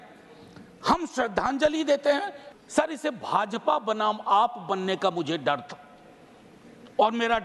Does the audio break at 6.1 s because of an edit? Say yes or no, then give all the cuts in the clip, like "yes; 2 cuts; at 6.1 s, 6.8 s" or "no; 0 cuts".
no; 1 cut; at 2.4 s